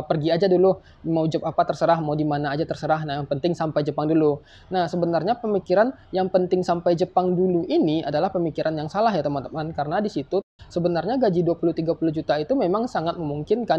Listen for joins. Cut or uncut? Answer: cut